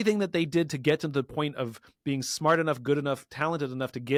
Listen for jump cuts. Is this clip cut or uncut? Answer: uncut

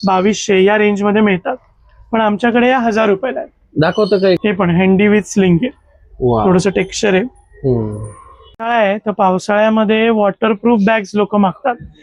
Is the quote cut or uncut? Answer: cut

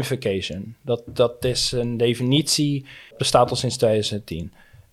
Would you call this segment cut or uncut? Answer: cut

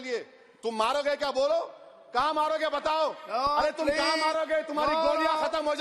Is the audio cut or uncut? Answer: uncut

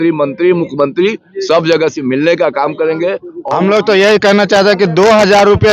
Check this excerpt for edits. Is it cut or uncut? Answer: cut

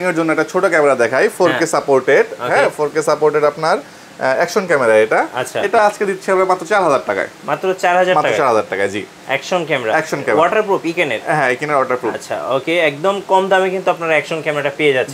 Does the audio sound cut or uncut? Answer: uncut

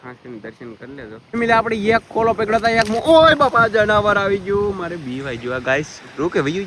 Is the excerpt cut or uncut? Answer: cut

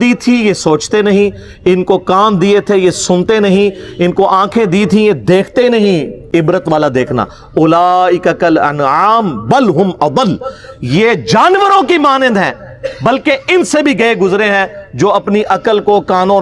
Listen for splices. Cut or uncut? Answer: uncut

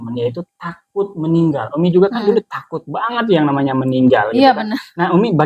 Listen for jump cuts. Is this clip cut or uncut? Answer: uncut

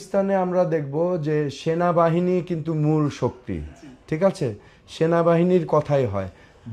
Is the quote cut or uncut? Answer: uncut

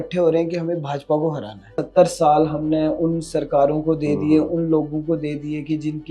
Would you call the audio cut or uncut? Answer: cut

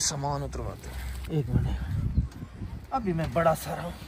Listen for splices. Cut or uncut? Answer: uncut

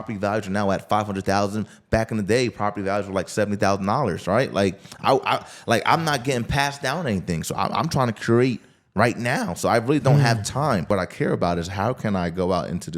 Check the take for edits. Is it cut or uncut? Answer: cut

